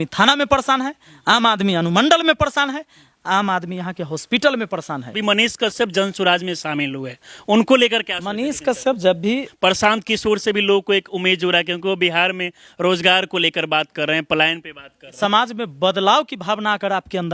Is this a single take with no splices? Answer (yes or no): no